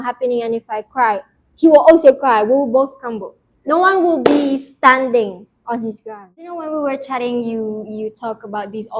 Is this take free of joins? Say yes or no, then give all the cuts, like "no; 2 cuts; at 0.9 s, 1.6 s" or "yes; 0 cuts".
no; 1 cut; at 6.5 s